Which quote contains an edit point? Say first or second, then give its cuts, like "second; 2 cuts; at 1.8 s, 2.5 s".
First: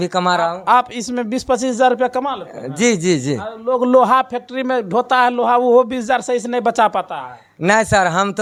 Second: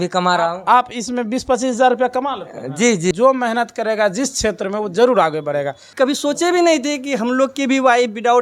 second; 2 cuts; at 3.1 s, 5.8 s